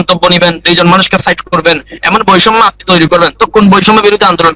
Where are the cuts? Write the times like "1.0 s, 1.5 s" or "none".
none